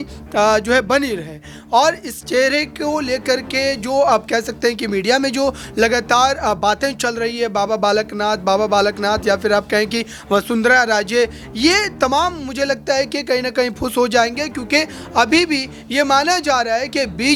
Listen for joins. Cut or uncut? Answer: uncut